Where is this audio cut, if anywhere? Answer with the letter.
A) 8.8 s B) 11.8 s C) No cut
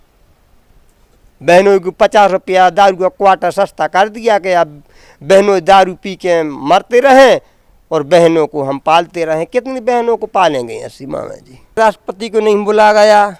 B